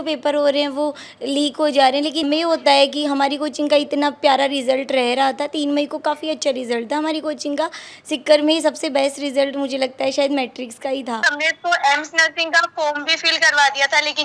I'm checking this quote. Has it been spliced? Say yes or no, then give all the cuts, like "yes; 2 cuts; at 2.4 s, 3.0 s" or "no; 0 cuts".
yes; 2 cuts; at 2.2 s, 11.3 s